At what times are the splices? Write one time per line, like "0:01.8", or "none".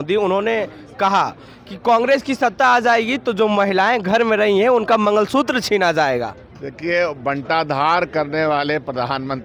none